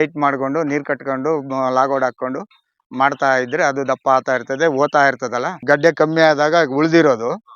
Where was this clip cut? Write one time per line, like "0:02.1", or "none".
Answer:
0:05.6